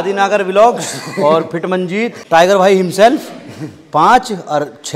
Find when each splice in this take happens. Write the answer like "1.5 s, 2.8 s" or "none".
2.2 s